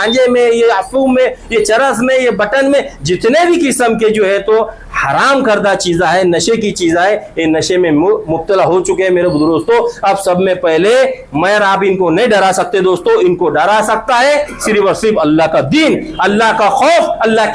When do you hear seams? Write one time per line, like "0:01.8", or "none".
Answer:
none